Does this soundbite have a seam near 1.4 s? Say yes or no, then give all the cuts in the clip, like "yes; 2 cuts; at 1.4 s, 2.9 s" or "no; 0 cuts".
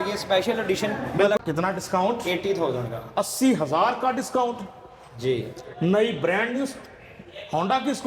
yes; 1 cut; at 1.4 s